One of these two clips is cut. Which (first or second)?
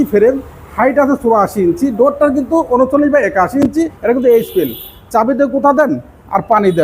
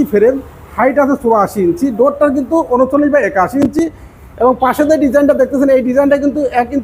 first